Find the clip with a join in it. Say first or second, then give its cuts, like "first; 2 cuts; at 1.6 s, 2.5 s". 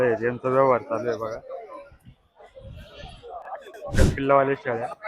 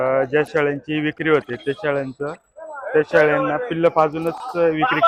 first; 1 cut; at 3.9 s